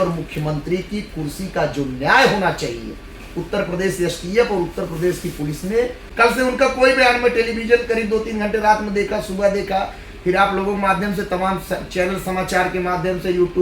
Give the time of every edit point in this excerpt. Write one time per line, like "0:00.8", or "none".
0:06.0